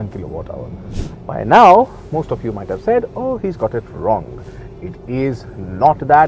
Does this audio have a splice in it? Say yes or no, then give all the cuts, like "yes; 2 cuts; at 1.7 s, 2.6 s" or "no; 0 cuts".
yes; 1 cut; at 1.1 s